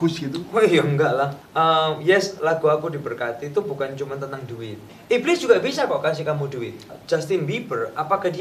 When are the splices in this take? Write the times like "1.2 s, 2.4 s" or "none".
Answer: 1.4 s, 4.9 s, 7.0 s